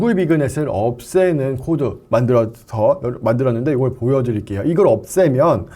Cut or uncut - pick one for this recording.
uncut